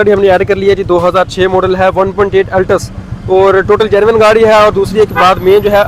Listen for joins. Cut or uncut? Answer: uncut